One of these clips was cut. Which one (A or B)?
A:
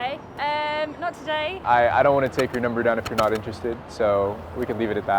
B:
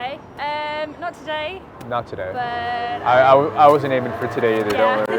A